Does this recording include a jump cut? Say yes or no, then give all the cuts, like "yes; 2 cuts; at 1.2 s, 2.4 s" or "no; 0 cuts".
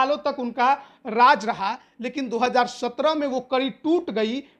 no; 0 cuts